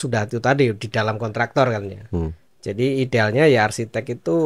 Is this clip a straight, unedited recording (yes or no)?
yes